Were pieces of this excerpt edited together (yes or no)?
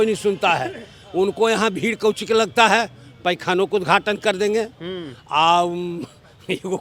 no